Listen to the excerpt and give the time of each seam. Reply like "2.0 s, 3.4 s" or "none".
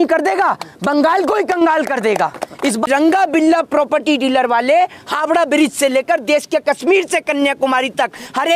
2.9 s